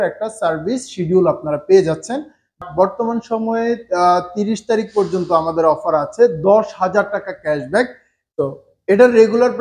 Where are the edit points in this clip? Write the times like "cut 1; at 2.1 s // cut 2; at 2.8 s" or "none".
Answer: cut 1; at 2.6 s // cut 2; at 8.3 s

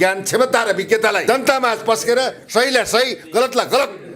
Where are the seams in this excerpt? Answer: cut 1; at 1.2 s

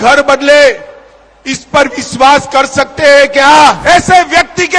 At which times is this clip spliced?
cut 1; at 3.8 s

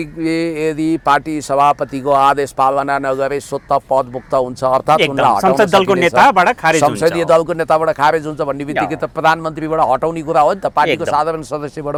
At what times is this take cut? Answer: none

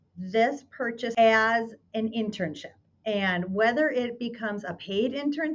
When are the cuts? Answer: cut 1; at 1.1 s

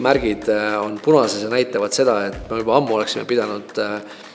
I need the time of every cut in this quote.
none

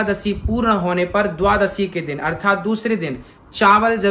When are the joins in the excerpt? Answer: none

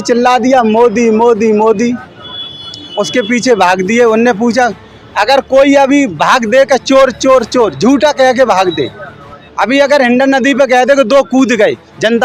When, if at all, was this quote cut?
none

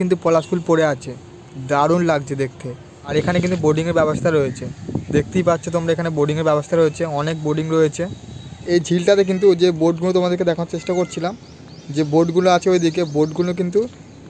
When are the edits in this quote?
cut 1; at 3.1 s // cut 2; at 8.6 s

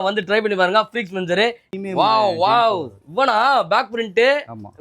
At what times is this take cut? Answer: cut 1; at 1.6 s

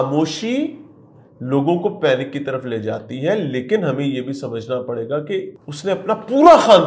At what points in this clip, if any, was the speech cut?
cut 1; at 5.6 s

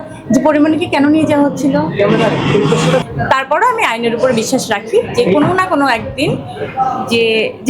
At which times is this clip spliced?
cut 1; at 3.0 s

